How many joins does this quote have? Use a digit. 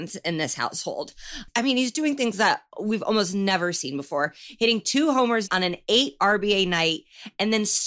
1